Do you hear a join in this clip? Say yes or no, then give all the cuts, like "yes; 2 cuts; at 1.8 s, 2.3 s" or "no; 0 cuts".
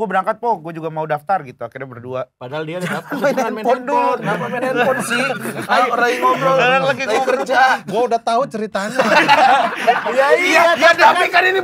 no; 0 cuts